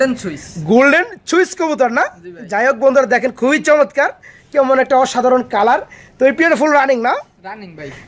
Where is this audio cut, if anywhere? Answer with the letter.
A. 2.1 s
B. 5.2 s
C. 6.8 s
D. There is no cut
D